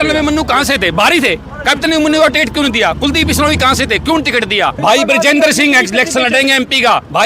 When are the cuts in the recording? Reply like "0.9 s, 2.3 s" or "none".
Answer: 4.8 s